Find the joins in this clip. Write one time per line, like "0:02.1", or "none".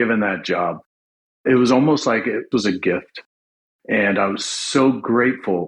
0:02.5